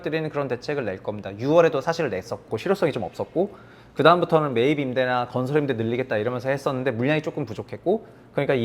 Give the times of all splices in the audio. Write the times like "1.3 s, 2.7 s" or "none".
2.4 s